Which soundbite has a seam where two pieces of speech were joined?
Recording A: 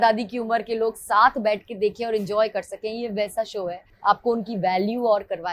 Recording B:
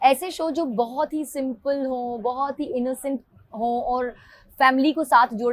A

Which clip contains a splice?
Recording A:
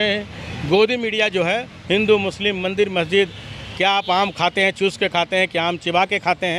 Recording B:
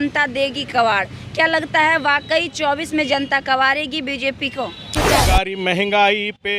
B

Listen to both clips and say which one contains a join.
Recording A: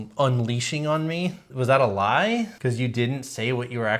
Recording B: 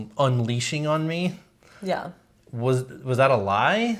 A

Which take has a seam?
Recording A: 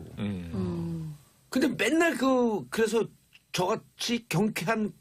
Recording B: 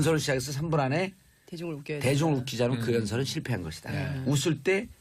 A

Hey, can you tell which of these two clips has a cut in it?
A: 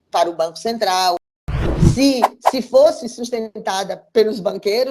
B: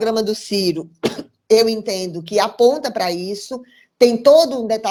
A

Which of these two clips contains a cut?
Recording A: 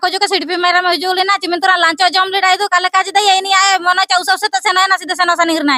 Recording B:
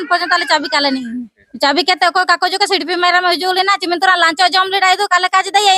B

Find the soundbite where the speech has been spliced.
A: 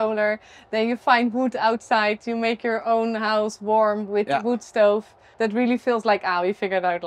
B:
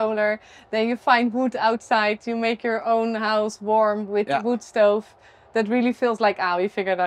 A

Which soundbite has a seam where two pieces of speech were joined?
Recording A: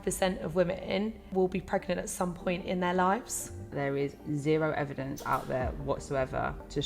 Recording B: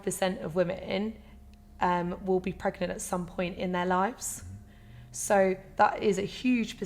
A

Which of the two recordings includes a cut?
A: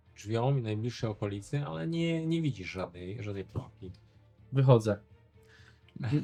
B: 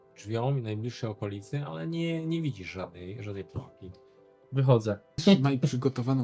B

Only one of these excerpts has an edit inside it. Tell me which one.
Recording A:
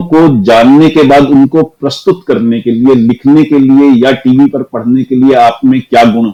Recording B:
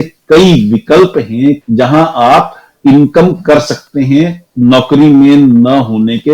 B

